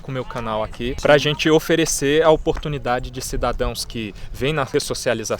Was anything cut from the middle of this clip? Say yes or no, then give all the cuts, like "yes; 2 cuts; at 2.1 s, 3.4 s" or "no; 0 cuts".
yes; 2 cuts; at 1.0 s, 4.7 s